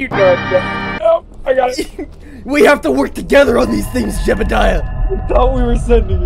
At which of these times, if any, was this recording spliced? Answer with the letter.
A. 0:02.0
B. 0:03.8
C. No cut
C